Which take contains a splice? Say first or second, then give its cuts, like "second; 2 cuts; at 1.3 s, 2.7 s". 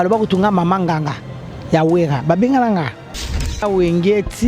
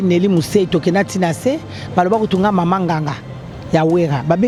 first; 1 cut; at 3.5 s